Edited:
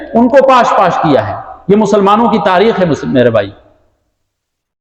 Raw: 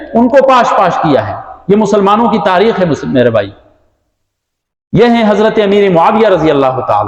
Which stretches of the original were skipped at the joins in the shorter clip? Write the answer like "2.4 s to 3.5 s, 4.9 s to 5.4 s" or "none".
none